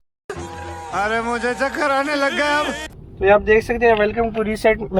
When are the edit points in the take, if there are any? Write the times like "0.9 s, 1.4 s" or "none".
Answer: 2.9 s